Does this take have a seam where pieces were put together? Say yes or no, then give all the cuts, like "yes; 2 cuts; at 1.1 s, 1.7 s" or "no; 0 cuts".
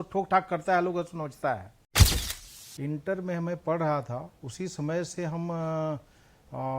yes; 1 cut; at 2.2 s